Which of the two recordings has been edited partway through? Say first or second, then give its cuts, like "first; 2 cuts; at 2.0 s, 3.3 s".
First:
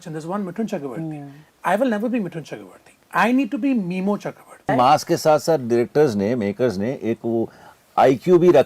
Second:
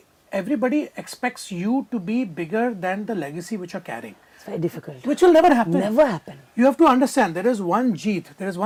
first; 1 cut; at 4.7 s